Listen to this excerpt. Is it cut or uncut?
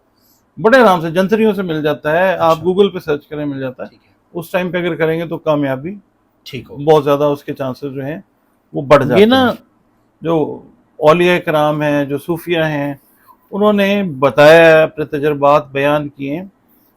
cut